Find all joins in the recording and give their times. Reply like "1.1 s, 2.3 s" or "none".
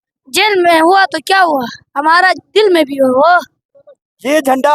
3.8 s